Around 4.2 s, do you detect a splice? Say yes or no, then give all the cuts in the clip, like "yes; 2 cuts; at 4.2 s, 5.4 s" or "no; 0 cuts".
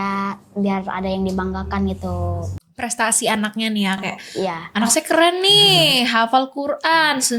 no; 1 cut; at 2.5 s